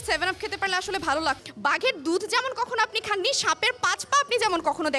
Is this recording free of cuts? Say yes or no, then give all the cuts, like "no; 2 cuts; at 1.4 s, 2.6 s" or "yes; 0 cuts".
no; 1 cut; at 1.4 s